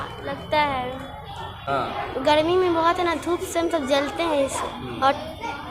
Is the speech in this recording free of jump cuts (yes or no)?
no